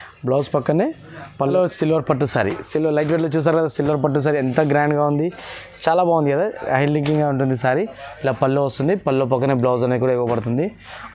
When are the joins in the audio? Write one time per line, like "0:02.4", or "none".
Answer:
0:01.5